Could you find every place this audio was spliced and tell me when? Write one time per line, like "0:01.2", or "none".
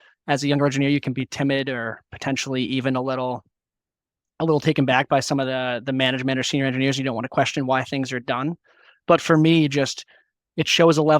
none